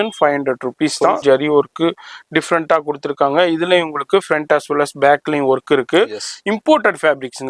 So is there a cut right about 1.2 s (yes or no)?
yes